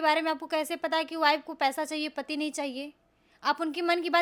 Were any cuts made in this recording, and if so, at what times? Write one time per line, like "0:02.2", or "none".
none

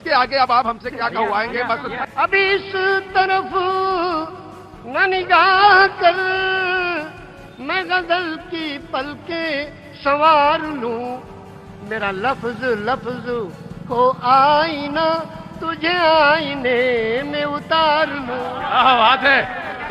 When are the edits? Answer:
0:02.1

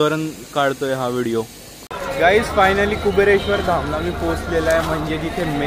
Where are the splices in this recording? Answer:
0:02.0

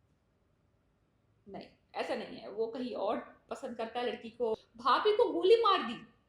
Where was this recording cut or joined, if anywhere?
0:04.6

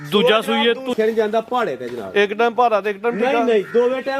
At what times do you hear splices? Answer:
0:00.9

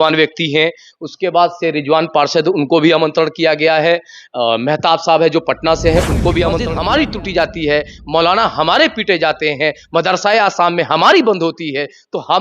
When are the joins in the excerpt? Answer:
0:06.7

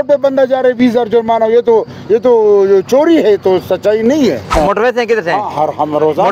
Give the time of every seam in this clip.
0:04.5

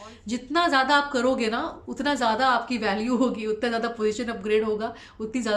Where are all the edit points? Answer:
none

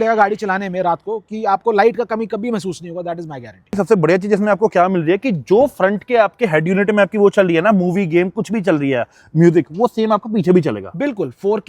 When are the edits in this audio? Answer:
0:03.7

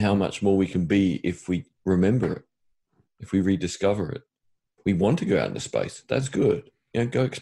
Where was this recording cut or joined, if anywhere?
0:04.8

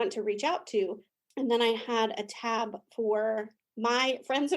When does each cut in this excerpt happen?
0:01.1

